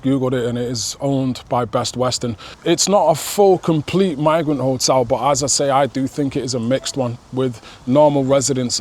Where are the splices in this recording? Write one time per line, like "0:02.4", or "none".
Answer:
none